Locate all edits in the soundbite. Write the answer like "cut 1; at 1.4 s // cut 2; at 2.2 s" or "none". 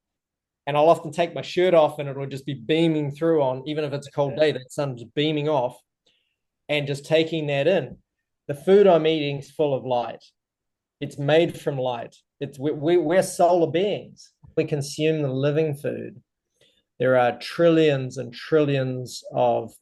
cut 1; at 14.5 s